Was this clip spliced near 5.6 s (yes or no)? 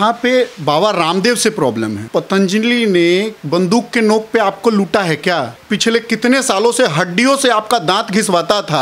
yes